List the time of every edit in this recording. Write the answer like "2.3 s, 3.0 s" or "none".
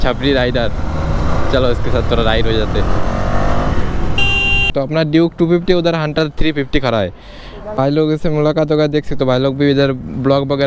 4.7 s, 7.8 s